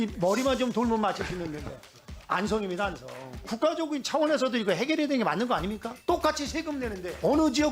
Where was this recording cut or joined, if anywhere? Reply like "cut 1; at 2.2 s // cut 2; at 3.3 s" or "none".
cut 1; at 3.5 s